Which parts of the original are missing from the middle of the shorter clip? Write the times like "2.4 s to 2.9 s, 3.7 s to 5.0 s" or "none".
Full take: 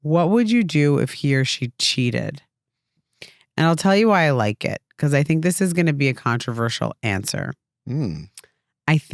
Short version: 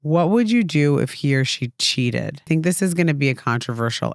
2.5 s to 5.3 s

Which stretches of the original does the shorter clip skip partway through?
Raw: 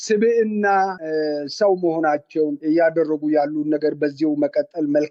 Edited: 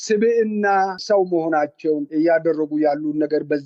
1.0 s to 1.5 s

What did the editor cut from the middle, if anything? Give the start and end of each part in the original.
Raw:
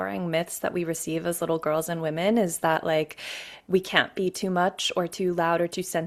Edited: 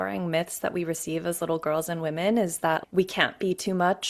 2.8 s to 3.6 s

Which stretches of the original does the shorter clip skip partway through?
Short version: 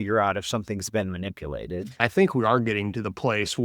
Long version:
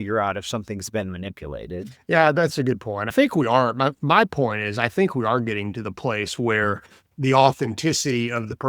1.9 s to 4.7 s

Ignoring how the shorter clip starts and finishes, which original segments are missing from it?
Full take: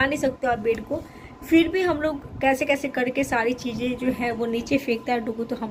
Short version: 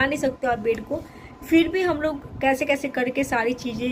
none

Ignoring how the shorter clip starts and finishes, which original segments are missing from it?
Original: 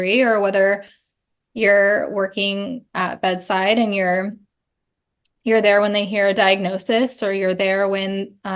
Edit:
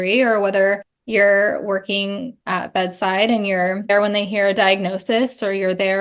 0.9 s to 1.4 s, 4.4 s to 5.7 s

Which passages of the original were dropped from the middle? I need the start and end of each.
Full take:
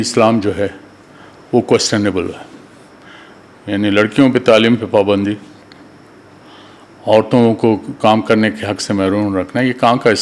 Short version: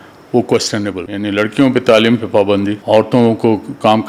2.2 s to 3.6 s, 5.4 s to 7.0 s

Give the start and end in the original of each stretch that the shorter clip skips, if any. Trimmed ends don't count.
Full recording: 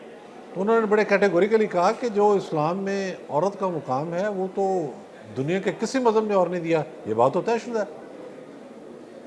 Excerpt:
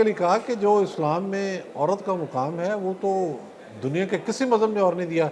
none

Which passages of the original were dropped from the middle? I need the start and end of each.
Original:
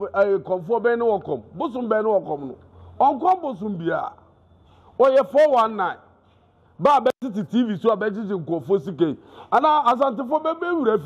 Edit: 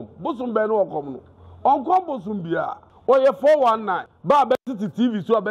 4.2 s to 4.8 s, 6.0 s to 6.6 s

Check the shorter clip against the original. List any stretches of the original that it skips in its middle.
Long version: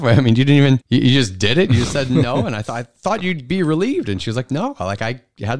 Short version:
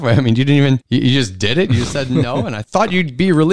2.6 s to 2.9 s

